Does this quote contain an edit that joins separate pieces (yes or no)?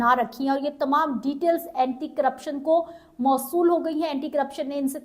no